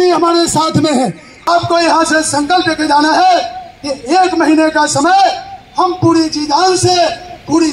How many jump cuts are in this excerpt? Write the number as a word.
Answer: one